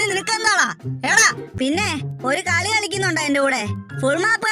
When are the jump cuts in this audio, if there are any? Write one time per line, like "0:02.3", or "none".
0:01.5